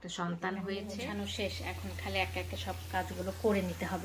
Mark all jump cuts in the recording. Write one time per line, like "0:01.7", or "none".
0:01.0